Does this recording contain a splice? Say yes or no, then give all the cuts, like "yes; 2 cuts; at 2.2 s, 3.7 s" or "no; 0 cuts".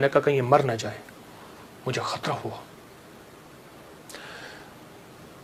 no; 0 cuts